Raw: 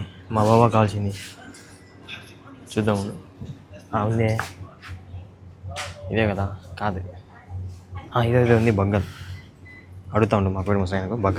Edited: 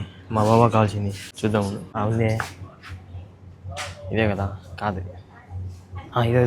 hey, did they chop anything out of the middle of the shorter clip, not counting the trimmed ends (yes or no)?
yes